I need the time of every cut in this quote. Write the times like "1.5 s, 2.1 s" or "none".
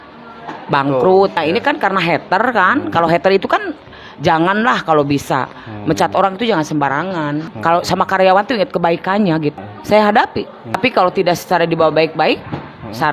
1.4 s, 7.5 s, 9.6 s, 10.8 s

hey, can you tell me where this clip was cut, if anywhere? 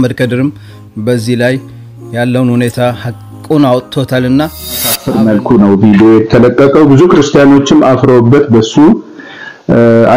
5.0 s

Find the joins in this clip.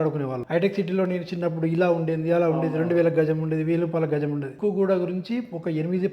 4.5 s

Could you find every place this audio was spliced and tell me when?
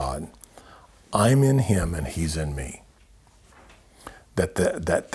none

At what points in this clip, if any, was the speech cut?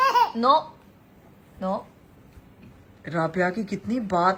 none

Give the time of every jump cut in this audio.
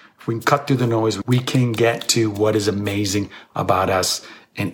1.2 s

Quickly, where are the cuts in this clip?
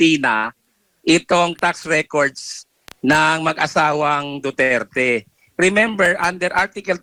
none

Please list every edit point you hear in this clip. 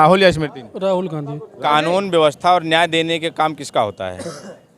1.5 s

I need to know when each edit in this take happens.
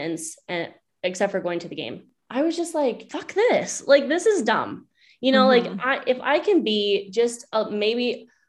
2.1 s, 3.1 s

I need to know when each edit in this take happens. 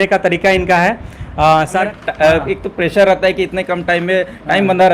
1.8 s

